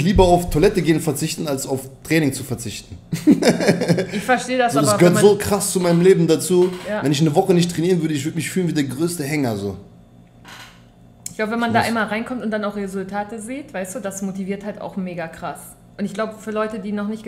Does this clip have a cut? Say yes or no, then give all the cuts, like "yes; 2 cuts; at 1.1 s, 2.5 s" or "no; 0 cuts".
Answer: no; 0 cuts